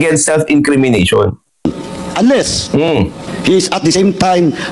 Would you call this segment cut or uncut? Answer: cut